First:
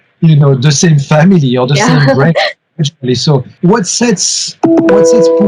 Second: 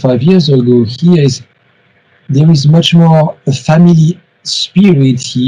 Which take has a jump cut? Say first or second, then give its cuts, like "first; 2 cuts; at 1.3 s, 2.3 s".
first; 1 cut; at 3.5 s